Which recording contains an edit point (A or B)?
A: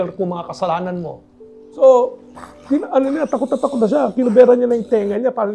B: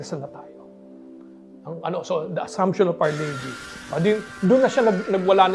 A